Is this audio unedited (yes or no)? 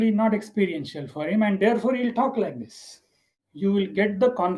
no